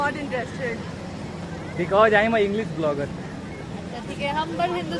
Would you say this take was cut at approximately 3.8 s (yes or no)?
no